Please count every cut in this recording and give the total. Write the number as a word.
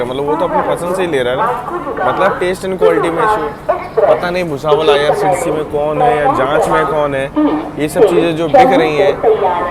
zero